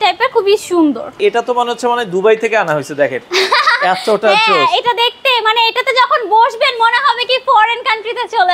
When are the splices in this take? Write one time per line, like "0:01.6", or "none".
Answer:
0:01.2